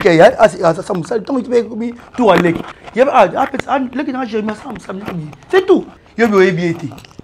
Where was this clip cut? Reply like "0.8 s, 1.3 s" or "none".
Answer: 6.0 s